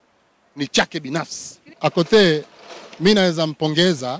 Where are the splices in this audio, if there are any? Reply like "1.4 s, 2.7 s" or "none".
1.7 s